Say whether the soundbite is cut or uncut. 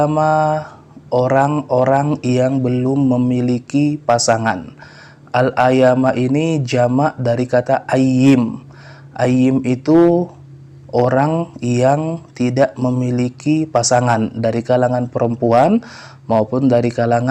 uncut